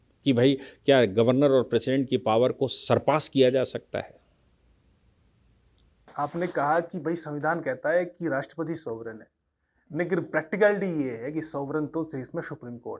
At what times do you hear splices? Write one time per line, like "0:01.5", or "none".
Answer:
0:06.0